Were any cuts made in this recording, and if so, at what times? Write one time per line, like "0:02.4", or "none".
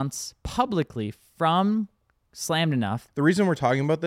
0:03.0